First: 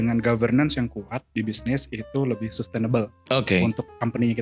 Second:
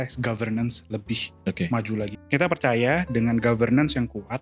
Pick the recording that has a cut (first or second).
second